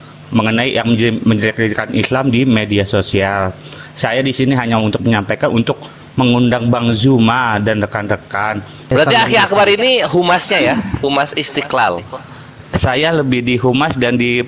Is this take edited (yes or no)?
yes